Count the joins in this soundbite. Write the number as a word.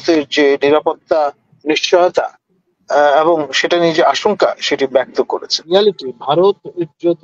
one